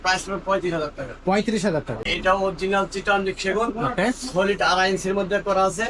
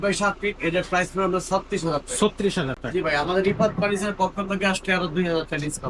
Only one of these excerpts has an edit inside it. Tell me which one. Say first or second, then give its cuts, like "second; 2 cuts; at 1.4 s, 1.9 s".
first; 1 cut; at 2.1 s